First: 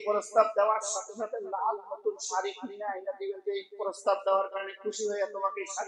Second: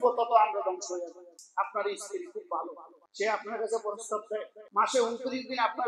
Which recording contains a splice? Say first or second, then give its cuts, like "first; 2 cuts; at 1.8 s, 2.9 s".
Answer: second; 2 cuts; at 1.4 s, 4.6 s